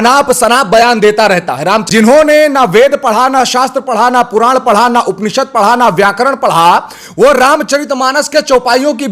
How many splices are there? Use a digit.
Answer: 1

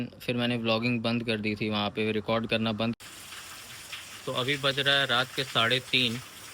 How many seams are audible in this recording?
1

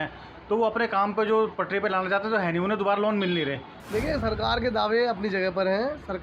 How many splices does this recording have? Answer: 1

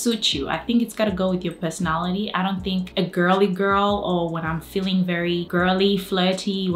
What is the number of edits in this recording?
2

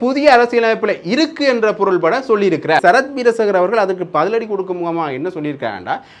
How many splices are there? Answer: 1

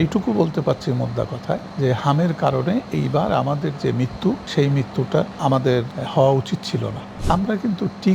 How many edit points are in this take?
4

